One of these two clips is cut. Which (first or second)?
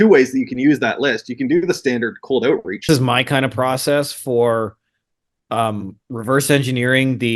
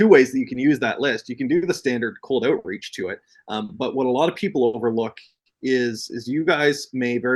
first